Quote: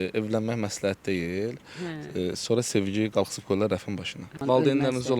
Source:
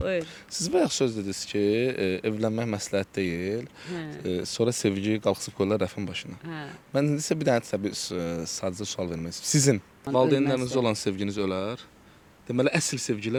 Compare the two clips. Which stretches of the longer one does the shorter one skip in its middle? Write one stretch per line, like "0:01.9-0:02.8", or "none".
0:06.4-0:09.9